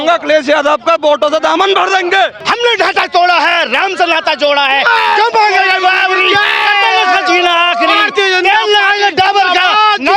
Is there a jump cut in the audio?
yes; 1 cut; at 2.4 s

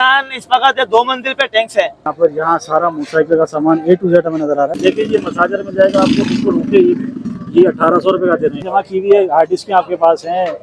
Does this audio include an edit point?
yes; 3 cuts; at 2.1 s, 4.8 s, 8.6 s

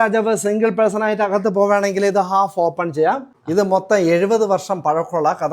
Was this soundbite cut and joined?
yes; 1 cut; at 3.3 s

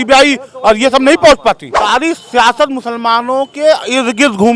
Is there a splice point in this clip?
yes; 1 cut; at 1.6 s

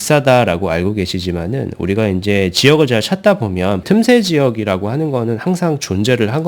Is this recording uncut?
no; 1 cut; at 3.8 s

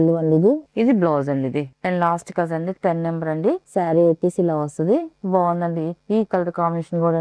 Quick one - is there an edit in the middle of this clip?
no; 0 cuts

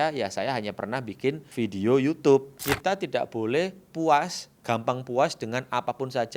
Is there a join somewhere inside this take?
yes; 2 cuts; at 1.4 s, 2.6 s

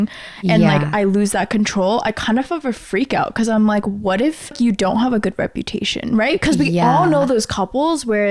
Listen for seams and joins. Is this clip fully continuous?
no; 1 cut; at 4.5 s

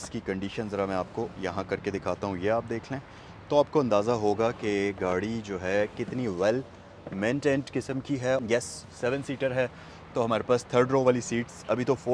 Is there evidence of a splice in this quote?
no; 0 cuts

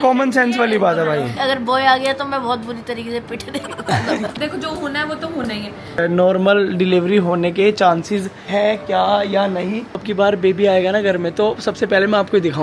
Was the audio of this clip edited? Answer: yes; 4 cuts; at 1.3 s, 4.3 s, 6.0 s, 10.1 s

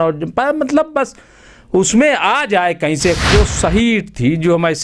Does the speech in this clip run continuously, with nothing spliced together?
no; 1 cut; at 3.3 s

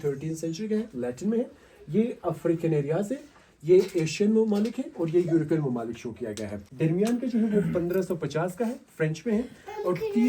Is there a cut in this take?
no; 0 cuts

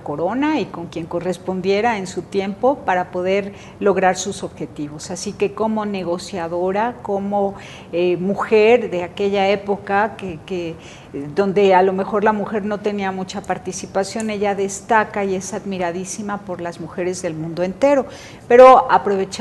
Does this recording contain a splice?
yes; 1 cut; at 3.6 s

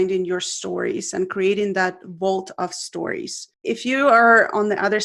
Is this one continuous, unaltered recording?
no; 1 cut; at 3.5 s

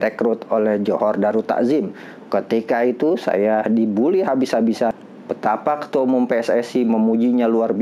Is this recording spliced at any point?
yes; 1 cut; at 4.9 s

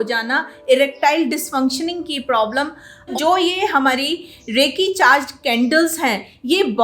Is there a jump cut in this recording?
yes; 1 cut; at 3.1 s

